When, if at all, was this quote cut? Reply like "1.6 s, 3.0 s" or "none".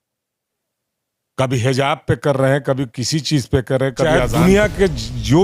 4.0 s